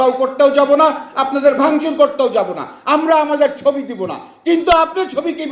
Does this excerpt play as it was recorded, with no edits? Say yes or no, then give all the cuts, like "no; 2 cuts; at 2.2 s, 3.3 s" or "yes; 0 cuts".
yes; 0 cuts